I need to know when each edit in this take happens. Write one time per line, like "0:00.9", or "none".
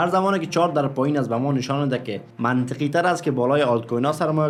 none